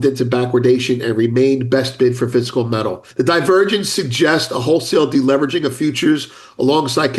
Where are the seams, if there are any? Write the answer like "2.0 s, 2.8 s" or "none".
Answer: 3.0 s